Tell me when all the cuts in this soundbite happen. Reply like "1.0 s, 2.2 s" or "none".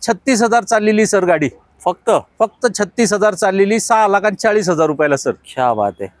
none